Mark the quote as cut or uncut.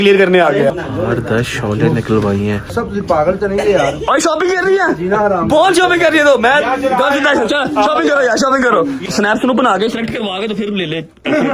cut